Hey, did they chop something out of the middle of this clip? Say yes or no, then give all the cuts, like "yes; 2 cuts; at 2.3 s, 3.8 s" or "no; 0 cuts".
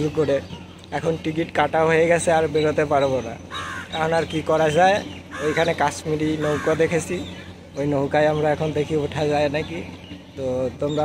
no; 0 cuts